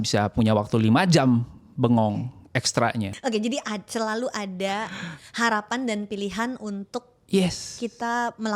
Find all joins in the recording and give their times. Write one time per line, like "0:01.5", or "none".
0:03.1